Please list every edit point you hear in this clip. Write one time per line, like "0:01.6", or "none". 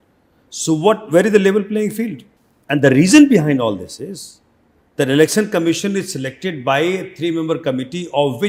none